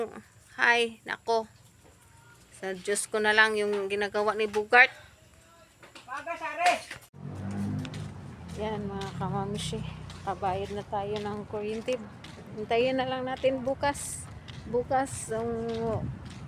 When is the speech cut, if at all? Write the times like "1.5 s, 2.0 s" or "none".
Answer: 7.0 s